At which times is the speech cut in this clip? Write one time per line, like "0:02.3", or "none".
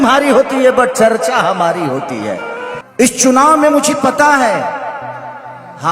0:02.7